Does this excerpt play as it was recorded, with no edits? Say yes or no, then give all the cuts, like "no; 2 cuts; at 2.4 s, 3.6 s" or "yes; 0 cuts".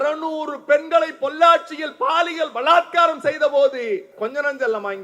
no; 1 cut; at 4.1 s